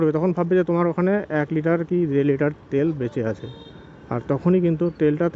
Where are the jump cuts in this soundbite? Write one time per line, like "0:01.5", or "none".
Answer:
none